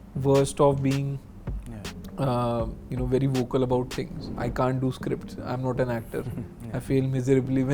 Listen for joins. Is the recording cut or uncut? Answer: cut